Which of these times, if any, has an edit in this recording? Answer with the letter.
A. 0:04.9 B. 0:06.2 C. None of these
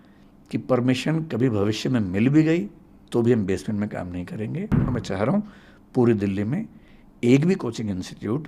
A